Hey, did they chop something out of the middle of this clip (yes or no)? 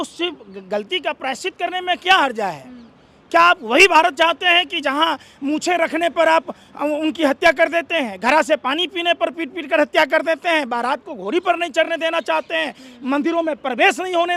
no